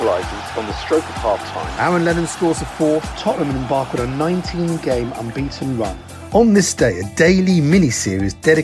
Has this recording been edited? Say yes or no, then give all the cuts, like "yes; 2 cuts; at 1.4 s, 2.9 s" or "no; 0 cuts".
no; 0 cuts